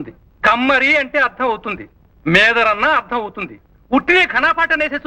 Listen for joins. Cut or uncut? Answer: uncut